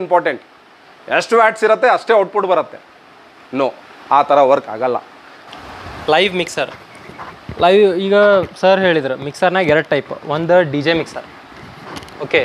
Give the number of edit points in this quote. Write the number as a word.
one